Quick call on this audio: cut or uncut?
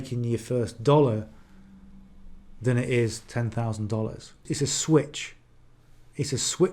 cut